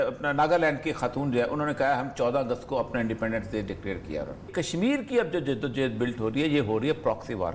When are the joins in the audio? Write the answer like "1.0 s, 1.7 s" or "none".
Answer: 4.5 s